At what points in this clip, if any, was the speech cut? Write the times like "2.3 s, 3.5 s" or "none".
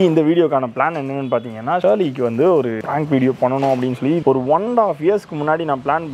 4.2 s